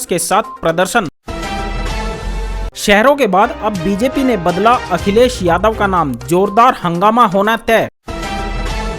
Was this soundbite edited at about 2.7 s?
yes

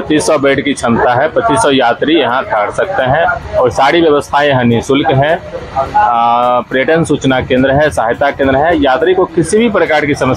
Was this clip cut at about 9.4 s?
no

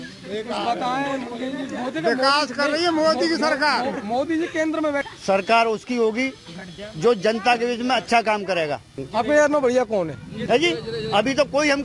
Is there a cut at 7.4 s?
no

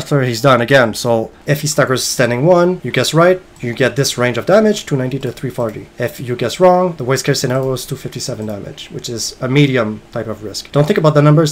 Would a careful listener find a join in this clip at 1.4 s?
yes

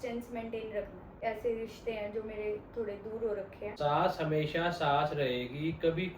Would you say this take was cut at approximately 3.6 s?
yes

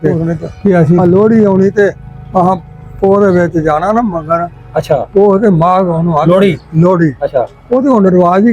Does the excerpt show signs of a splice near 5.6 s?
no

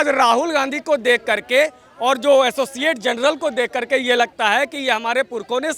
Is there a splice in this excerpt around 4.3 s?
no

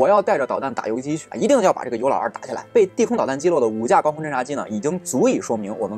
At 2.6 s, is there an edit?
yes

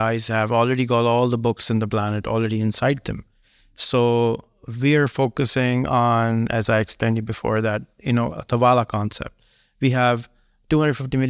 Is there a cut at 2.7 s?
no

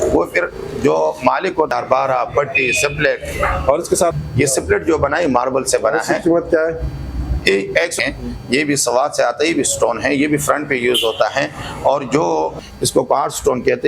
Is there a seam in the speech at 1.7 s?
yes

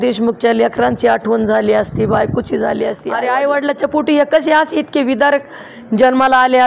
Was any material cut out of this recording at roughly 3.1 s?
yes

